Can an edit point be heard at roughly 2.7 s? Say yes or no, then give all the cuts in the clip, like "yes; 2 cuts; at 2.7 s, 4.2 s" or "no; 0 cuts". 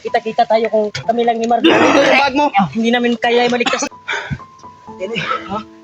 no; 1 cut; at 3.9 s